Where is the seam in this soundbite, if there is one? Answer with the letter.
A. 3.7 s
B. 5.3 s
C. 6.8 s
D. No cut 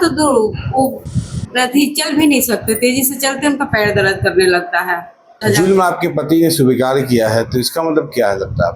B